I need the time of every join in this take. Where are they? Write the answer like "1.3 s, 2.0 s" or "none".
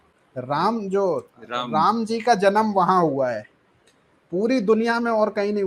none